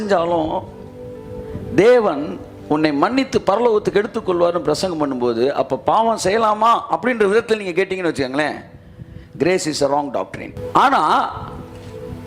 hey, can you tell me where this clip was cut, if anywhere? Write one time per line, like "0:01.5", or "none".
0:10.5